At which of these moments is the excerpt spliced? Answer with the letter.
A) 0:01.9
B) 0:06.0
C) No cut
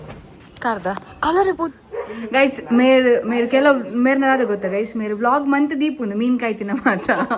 A